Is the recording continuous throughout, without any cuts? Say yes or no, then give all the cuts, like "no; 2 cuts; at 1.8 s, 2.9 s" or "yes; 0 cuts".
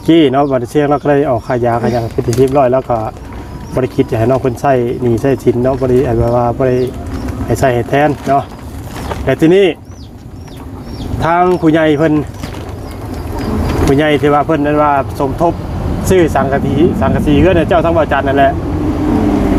yes; 0 cuts